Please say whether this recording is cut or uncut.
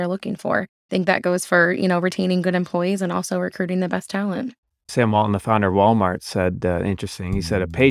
cut